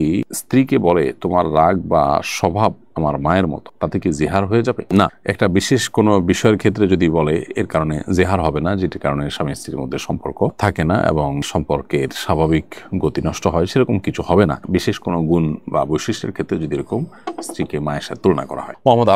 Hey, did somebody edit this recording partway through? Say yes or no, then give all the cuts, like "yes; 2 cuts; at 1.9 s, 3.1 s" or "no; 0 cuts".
no; 0 cuts